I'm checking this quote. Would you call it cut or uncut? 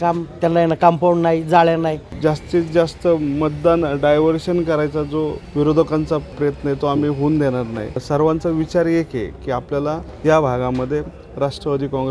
cut